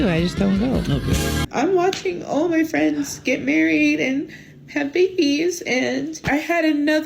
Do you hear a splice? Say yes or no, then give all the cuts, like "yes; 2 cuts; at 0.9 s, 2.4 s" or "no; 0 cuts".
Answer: yes; 2 cuts; at 1.4 s, 6.2 s